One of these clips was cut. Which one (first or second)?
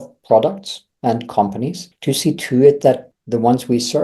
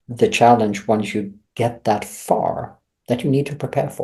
first